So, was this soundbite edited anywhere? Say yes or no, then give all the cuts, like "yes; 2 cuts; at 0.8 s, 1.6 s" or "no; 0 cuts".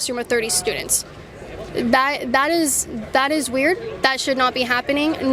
no; 0 cuts